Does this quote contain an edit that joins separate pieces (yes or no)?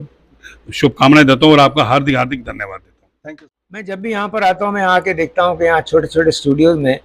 yes